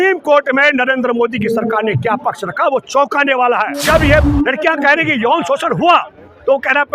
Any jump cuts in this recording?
yes; 1 cut; at 3.8 s

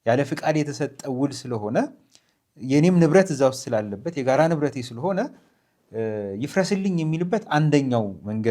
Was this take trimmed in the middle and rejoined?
no; 0 cuts

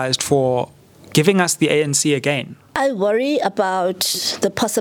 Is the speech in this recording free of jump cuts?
no; 1 cut; at 2.7 s

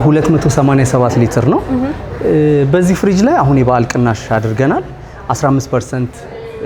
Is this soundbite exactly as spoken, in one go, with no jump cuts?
yes; 0 cuts

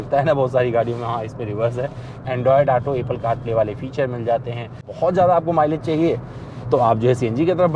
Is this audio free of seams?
no; 2 cuts; at 2.1 s, 4.9 s

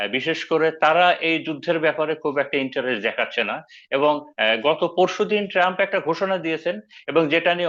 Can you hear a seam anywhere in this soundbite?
no; 0 cuts

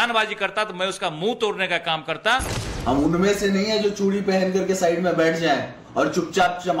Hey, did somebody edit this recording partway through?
yes; 1 cut; at 2.6 s

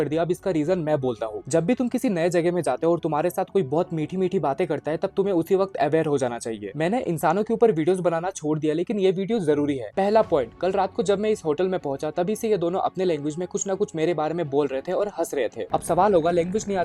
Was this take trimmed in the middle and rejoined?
no; 0 cuts

